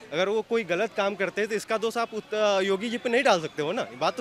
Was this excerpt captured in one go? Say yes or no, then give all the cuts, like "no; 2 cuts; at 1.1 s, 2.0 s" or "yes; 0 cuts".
yes; 0 cuts